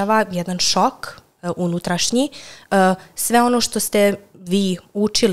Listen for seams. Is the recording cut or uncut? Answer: uncut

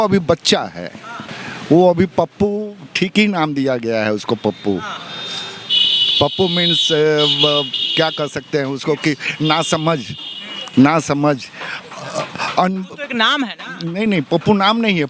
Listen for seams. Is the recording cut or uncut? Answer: uncut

